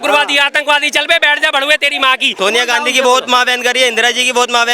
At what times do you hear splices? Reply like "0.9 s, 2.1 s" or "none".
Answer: 2.3 s